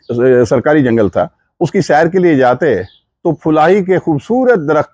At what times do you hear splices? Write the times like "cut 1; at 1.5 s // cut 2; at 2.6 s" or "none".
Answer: none